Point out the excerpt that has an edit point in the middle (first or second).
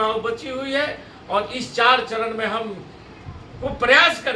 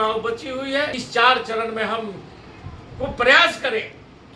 second